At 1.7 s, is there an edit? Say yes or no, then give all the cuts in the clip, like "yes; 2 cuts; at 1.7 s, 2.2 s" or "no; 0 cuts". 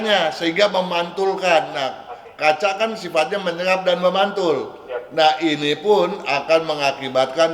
no; 0 cuts